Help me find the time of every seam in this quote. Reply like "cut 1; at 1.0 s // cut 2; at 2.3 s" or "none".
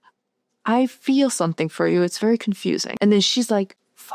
cut 1; at 2.9 s